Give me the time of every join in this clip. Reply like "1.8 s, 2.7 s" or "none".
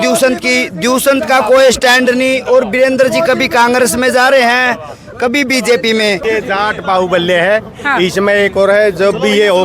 6.4 s